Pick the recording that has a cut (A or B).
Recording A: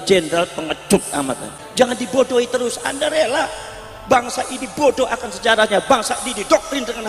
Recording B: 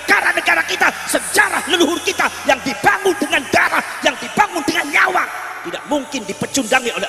A